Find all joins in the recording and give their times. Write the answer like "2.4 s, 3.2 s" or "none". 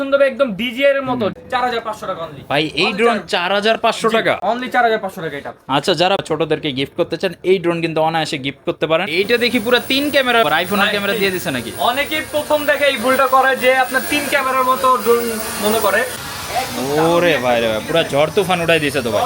1.4 s, 6.2 s, 9.1 s, 10.4 s, 16.2 s